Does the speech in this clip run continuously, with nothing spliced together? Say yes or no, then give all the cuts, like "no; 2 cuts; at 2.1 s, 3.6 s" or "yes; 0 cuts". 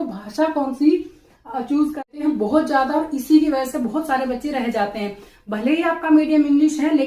no; 1 cut; at 2.0 s